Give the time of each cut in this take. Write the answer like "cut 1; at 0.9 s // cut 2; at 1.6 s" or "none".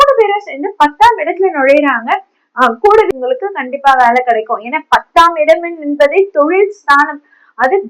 cut 1; at 3.1 s